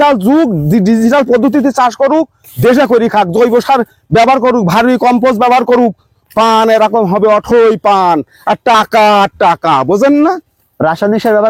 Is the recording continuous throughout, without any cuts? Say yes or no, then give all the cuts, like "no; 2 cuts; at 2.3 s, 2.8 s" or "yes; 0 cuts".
yes; 0 cuts